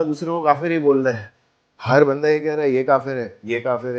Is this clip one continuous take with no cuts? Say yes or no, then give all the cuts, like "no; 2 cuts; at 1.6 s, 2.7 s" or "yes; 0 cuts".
yes; 0 cuts